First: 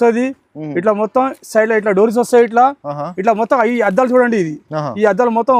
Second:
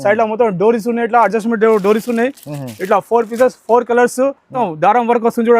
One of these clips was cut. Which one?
second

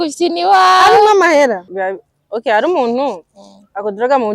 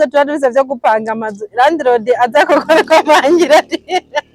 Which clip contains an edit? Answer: first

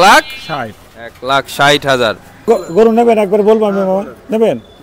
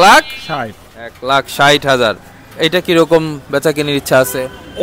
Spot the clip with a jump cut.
first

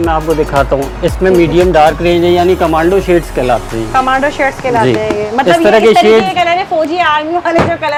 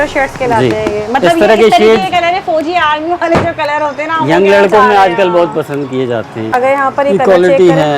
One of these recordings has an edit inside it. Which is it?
second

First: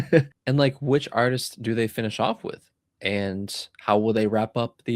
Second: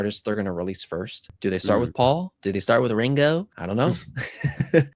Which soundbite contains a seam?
second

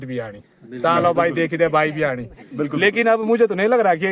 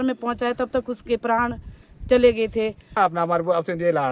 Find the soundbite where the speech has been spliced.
second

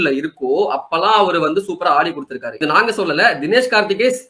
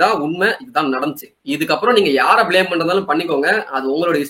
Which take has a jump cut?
first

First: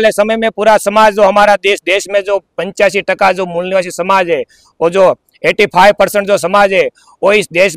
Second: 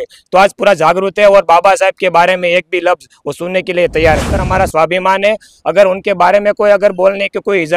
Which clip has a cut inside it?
second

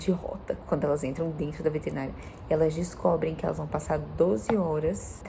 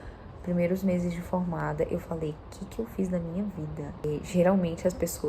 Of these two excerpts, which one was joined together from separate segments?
second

